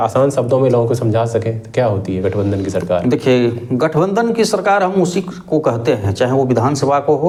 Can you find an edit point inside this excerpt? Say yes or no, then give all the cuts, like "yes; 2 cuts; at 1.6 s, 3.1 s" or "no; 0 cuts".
no; 0 cuts